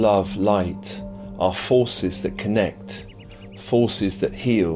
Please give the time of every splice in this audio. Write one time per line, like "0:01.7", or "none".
none